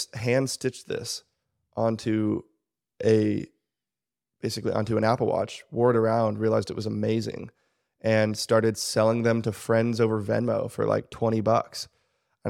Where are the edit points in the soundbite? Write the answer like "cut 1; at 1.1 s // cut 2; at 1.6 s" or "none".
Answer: none